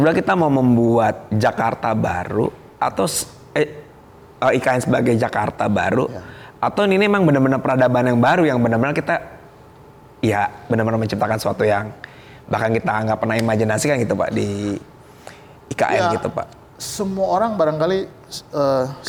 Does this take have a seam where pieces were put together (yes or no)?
no